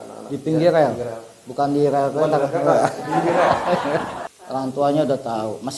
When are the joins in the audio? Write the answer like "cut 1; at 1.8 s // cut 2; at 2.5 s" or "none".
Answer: cut 1; at 4.2 s